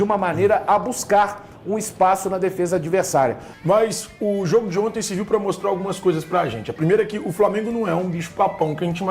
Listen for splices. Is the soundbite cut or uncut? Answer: cut